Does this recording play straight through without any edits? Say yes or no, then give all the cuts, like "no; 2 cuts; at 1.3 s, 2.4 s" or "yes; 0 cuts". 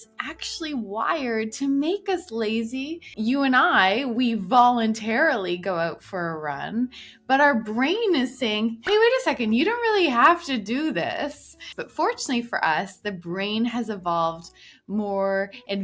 no; 1 cut; at 3.1 s